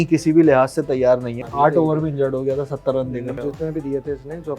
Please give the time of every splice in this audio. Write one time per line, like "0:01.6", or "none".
0:01.4
0:03.4